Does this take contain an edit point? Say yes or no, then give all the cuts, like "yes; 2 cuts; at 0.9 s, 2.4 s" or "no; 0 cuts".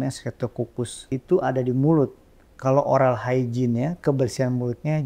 yes; 1 cut; at 1.0 s